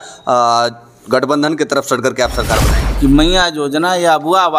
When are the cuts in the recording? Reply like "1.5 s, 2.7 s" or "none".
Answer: 2.8 s